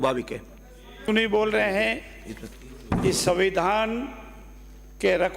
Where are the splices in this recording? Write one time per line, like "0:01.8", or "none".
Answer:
0:01.0